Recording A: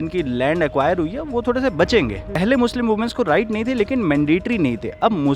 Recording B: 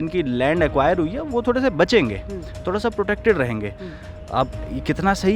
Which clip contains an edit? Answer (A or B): A